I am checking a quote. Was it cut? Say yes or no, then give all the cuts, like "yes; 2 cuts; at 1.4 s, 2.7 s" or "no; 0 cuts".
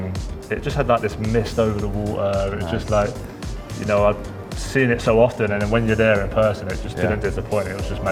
no; 0 cuts